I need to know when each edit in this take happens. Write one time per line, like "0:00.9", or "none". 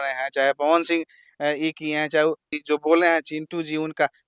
0:02.5